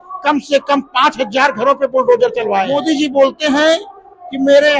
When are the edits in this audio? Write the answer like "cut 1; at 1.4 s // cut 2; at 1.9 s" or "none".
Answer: cut 1; at 2.7 s